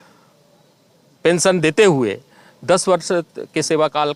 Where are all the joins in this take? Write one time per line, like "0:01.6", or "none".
none